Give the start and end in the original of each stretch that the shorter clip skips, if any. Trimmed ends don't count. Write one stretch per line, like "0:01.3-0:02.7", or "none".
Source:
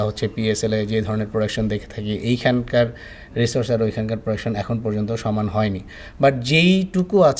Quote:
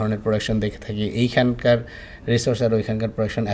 none